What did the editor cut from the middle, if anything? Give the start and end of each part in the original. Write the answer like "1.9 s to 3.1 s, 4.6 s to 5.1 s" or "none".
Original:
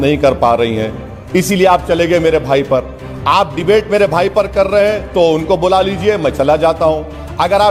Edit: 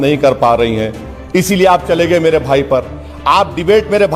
none